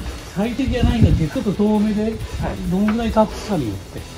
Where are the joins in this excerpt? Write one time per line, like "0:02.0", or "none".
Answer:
0:01.3